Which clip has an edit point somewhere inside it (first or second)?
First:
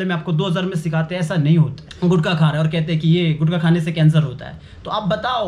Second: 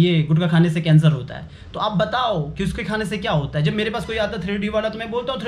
first